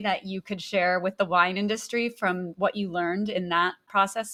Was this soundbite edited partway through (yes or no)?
no